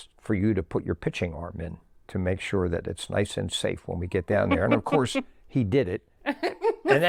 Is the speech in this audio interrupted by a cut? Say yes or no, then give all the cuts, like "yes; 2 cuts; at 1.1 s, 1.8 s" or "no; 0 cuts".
no; 0 cuts